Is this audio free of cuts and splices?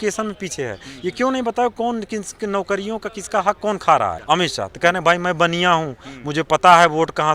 no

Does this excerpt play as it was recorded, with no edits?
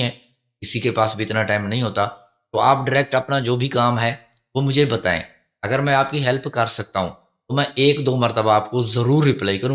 yes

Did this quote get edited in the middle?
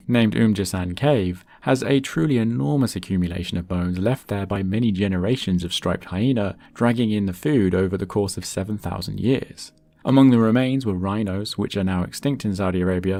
no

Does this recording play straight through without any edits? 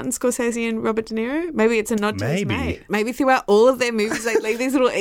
no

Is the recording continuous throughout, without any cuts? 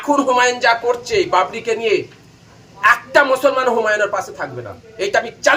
yes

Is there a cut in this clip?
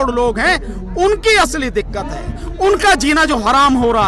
no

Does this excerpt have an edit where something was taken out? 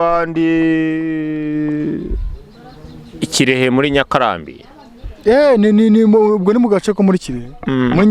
no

